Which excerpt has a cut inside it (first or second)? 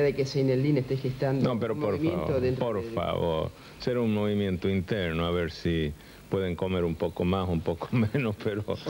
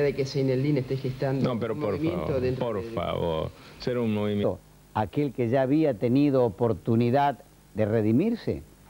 first